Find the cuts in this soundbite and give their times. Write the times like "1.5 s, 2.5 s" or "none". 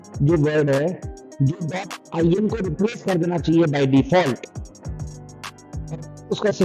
none